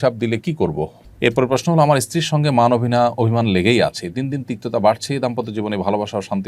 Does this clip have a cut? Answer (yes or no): yes